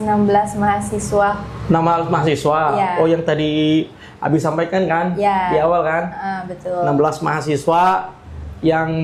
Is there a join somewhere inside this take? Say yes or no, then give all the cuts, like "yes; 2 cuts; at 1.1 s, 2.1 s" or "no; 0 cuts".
no; 0 cuts